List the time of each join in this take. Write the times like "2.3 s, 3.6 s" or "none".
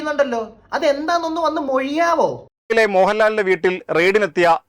2.7 s